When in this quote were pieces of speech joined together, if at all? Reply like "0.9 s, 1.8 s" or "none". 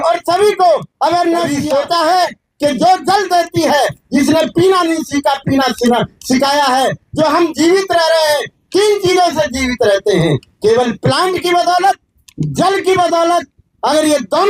1.5 s